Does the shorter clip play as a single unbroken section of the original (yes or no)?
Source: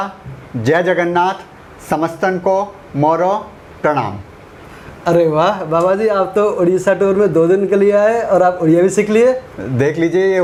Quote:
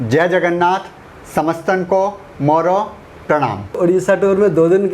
no